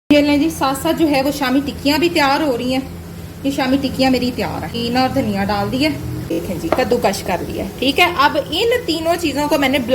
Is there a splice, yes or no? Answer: yes